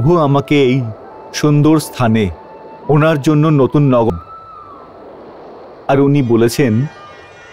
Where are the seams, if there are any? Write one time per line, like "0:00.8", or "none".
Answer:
0:04.1

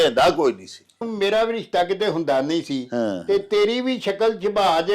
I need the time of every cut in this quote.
0:01.1

